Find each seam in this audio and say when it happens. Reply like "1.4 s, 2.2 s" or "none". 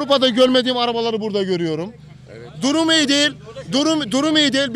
none